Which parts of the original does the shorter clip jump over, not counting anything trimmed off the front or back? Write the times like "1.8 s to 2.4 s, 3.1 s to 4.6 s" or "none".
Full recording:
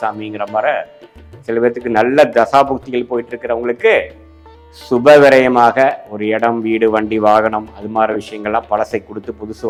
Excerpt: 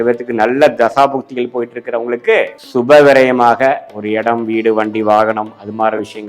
4.2 s to 4.8 s